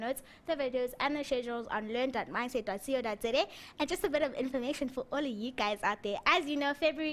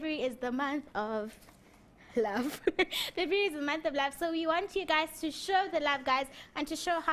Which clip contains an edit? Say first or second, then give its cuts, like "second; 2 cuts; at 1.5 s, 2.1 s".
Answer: first; 1 cut; at 2.6 s